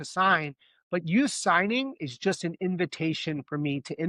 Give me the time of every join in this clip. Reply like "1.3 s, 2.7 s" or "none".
none